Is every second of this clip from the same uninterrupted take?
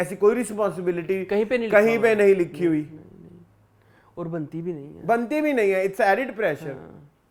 yes; 0 cuts

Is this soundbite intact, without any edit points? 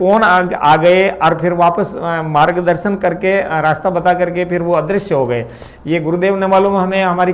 yes; 0 cuts

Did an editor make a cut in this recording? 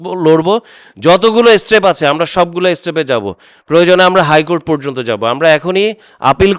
no; 0 cuts

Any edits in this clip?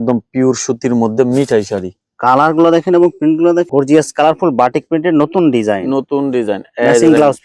yes; 1 cut; at 3.7 s

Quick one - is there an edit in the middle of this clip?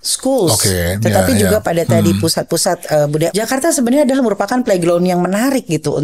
yes; 1 cut; at 3.3 s

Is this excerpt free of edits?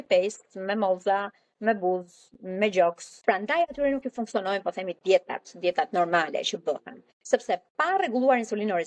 no; 1 cut; at 3.1 s

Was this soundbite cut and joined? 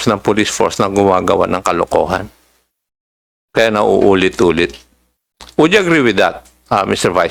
no; 0 cuts

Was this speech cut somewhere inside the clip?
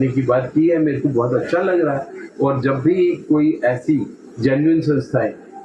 no; 0 cuts

